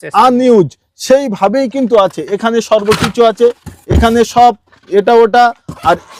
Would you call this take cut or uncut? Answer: uncut